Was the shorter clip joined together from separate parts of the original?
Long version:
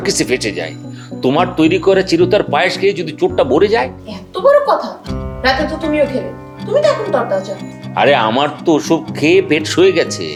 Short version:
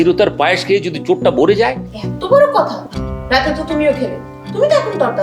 no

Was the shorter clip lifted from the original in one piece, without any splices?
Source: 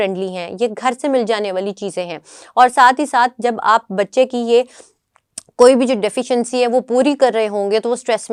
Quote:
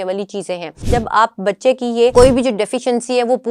no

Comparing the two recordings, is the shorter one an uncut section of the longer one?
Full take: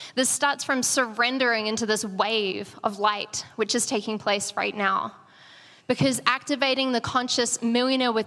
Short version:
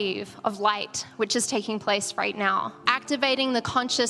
no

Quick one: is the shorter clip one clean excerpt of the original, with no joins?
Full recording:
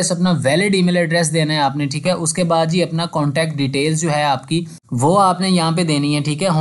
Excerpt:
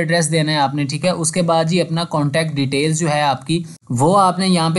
yes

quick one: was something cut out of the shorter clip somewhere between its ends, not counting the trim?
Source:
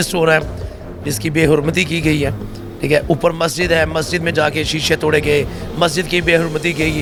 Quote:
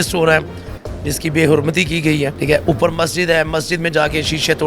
yes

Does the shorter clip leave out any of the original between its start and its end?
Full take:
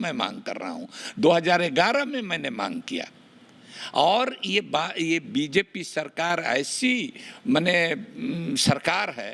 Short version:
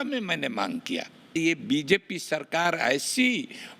yes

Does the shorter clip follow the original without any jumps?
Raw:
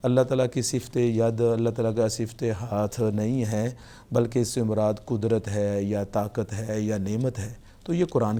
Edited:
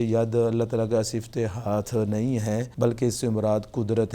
no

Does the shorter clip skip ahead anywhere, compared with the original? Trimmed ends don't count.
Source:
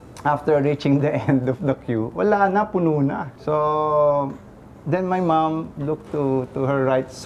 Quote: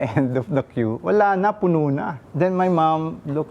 yes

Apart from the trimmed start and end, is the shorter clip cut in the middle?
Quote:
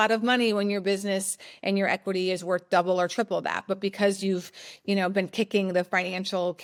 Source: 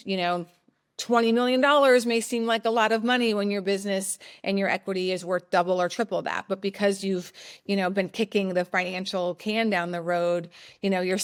no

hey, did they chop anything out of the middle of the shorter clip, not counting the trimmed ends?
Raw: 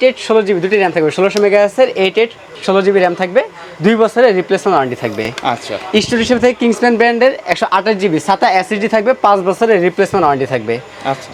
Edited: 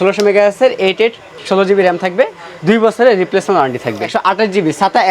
yes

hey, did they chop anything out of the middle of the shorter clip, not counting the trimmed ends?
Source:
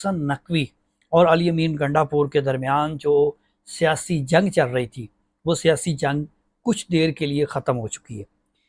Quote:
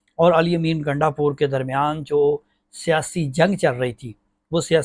no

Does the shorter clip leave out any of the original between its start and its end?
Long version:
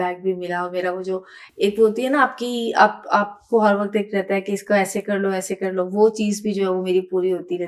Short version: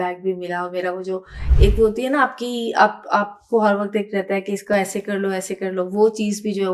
no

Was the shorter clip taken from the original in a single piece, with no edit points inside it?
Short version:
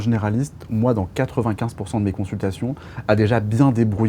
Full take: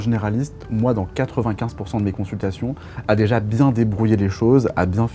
yes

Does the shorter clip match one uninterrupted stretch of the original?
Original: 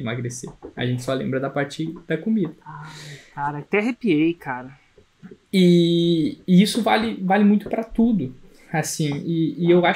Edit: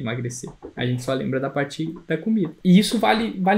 no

